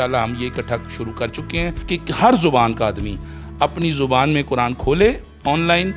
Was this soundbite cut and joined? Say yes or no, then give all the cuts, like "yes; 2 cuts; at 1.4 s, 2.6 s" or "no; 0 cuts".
yes; 1 cut; at 1.8 s